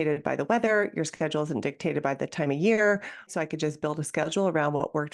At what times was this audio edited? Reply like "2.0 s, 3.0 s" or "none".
3.3 s